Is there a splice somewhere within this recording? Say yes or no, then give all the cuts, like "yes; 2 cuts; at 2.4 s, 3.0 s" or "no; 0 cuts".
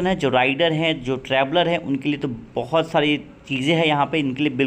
no; 0 cuts